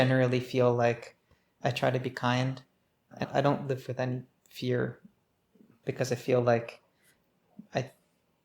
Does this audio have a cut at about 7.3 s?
no; 3 cuts; at 1.4 s, 3.2 s, 5.7 s

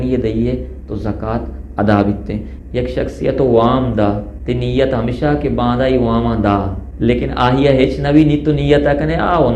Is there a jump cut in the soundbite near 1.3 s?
no; 3 cuts; at 2.5 s, 4.3 s, 6.8 s

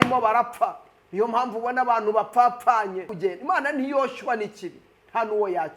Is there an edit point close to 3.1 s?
yes; 1 cut; at 3.1 s

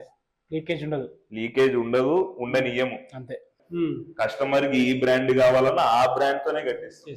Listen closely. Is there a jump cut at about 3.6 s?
yes; 1 cut; at 3.6 s

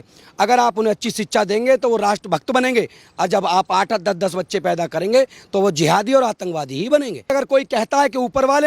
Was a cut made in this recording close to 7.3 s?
yes; 1 cut; at 7.3 s

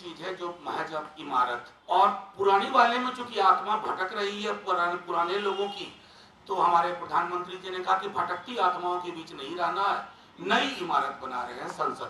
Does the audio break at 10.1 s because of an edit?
no; 1 cut; at 1.7 s

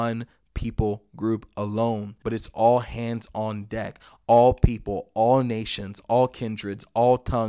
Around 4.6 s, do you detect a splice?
no; 1 cut; at 2.1 s

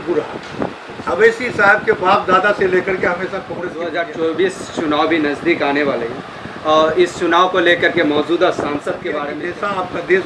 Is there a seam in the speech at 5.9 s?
no; 2 cuts; at 3.7 s, 9.3 s

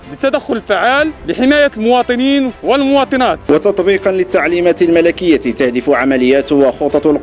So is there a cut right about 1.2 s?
yes; 2 cuts; at 1.2 s, 3.4 s

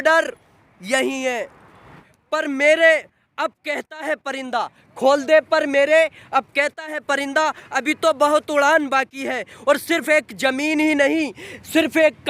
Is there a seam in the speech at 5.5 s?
no; 1 cut; at 2.0 s

